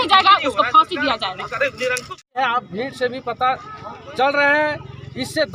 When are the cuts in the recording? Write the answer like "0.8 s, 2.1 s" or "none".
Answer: 2.4 s